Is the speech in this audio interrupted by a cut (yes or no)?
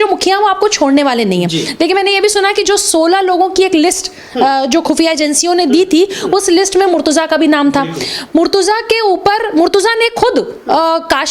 no